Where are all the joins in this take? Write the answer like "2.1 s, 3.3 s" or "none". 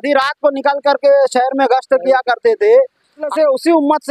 3.2 s